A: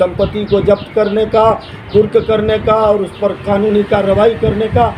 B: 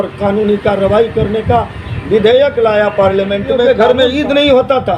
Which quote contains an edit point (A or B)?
B